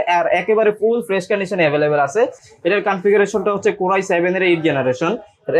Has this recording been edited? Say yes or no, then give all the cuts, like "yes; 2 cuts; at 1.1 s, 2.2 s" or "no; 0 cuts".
no; 0 cuts